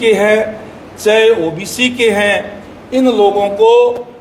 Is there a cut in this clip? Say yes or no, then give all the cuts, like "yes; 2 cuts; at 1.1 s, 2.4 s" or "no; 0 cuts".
no; 0 cuts